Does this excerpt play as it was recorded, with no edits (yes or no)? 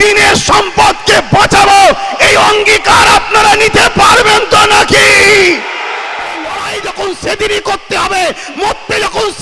no